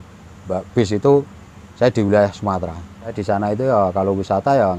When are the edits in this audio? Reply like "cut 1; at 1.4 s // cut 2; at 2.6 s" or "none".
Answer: cut 1; at 3.2 s